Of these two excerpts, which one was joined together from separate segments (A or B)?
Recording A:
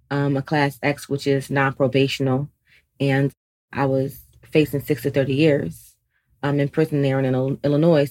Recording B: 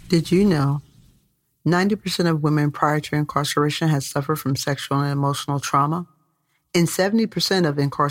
A